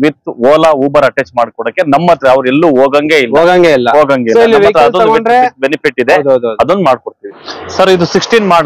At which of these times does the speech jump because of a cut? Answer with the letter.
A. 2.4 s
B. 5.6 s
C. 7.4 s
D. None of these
C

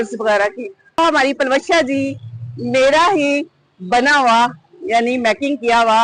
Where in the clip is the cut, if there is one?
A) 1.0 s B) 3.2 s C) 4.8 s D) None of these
A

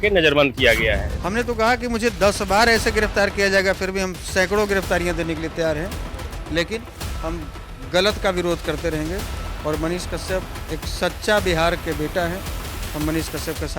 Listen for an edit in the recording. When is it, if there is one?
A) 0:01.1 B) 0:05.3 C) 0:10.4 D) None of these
A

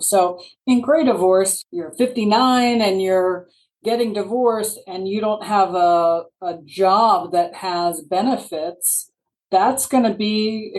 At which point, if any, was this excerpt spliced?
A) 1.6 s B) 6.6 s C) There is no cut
A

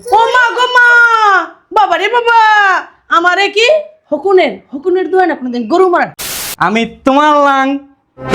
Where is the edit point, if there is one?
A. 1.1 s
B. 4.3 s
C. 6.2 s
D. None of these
C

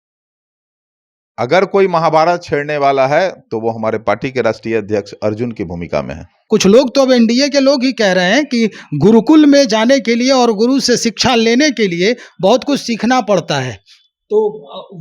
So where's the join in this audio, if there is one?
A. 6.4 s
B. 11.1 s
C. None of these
A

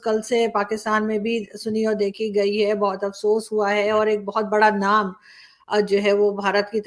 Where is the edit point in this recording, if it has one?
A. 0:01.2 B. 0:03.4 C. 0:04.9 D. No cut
D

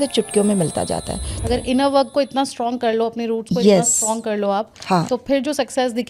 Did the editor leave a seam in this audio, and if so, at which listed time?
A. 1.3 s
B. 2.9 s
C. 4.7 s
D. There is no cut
A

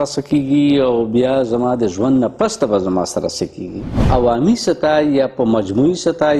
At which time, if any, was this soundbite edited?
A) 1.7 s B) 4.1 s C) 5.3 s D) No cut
B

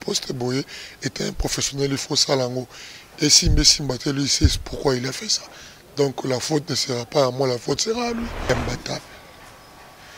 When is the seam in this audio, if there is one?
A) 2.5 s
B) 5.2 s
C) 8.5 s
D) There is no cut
C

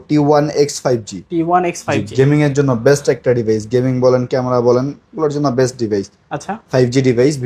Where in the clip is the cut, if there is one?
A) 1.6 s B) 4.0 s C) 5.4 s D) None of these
D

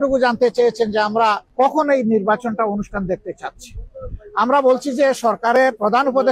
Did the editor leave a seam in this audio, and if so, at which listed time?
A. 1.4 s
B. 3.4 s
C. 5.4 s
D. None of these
A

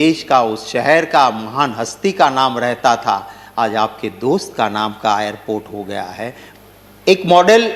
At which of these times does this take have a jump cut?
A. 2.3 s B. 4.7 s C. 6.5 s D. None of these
C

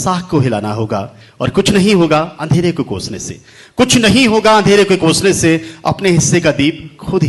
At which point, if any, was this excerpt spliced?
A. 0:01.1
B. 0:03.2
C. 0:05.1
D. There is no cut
D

